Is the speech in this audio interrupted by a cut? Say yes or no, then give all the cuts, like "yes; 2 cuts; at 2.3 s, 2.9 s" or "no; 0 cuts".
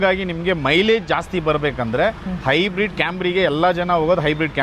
no; 0 cuts